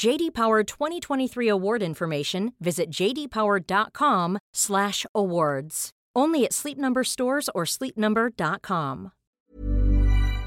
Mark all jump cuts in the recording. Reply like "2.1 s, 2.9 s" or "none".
9.4 s